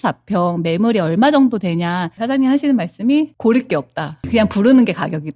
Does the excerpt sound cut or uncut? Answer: cut